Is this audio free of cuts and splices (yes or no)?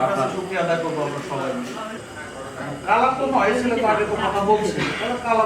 no